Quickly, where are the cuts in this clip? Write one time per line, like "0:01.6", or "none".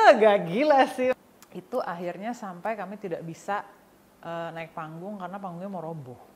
0:01.1